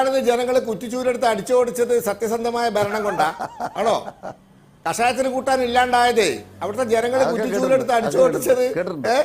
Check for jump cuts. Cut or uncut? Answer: cut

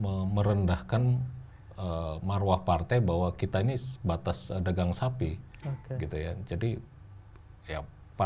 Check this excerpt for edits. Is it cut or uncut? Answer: uncut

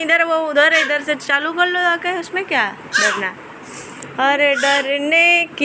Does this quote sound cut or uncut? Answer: uncut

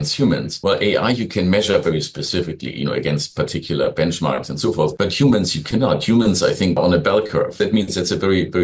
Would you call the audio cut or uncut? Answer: uncut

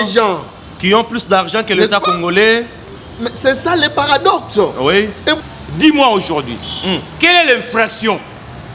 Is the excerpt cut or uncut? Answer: cut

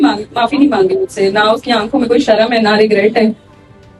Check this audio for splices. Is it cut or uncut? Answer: uncut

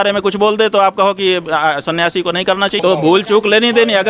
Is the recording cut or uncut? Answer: cut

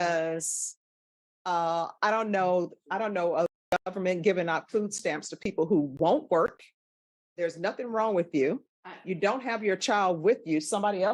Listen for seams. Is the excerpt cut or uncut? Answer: uncut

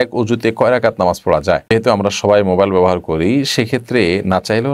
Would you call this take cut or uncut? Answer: cut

